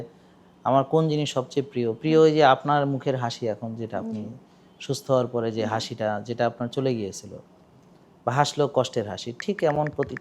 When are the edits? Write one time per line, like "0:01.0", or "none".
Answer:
none